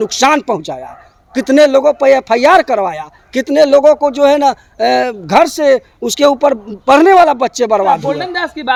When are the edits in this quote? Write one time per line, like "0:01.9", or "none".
none